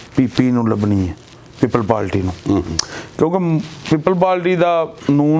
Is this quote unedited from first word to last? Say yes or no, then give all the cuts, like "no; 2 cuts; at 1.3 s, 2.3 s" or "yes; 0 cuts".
yes; 0 cuts